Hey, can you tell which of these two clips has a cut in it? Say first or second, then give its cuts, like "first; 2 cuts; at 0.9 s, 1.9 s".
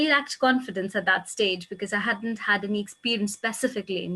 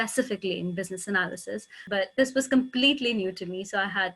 second; 1 cut; at 1.8 s